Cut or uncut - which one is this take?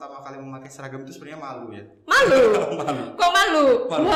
uncut